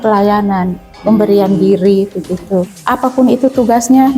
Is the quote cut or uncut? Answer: cut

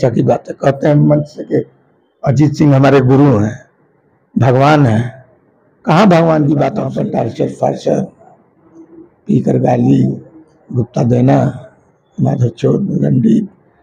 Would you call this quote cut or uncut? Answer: cut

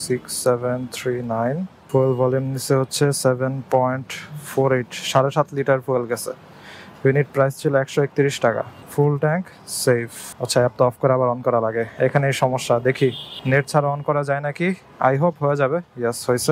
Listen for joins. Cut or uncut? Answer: uncut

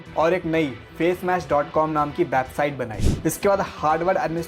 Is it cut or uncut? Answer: cut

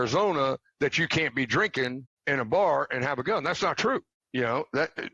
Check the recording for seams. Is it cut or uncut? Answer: cut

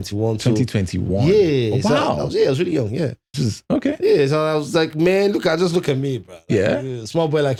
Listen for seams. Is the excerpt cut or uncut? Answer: uncut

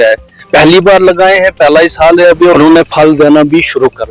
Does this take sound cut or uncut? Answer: cut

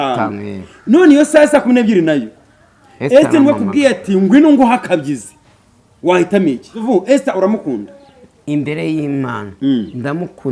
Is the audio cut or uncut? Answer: cut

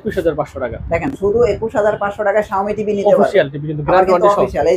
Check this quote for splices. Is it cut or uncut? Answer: uncut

